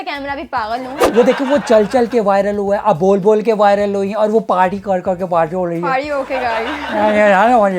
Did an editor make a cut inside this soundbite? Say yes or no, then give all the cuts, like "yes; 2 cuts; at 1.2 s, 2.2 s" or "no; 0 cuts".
yes; 1 cut; at 1.0 s